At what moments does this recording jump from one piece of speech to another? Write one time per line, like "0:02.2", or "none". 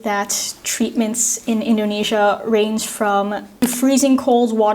0:03.5